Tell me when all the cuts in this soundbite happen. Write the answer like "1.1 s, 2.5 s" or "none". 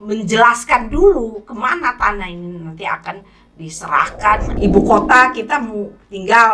4.5 s